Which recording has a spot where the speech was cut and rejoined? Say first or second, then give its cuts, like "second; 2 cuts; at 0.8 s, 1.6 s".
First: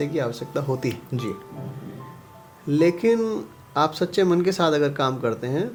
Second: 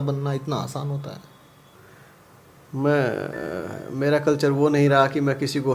second; 1 cut; at 1.7 s